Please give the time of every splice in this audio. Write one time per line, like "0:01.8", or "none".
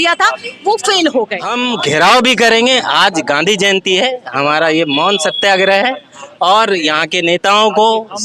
0:01.4